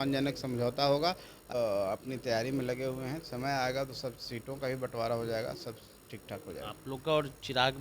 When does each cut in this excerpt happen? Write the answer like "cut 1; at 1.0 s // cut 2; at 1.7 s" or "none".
cut 1; at 1.5 s